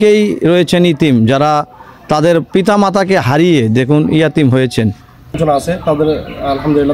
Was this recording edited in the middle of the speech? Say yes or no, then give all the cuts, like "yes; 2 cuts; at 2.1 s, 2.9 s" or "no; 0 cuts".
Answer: yes; 1 cut; at 5.4 s